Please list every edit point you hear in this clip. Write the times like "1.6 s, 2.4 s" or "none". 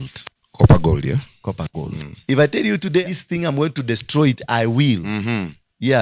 2.2 s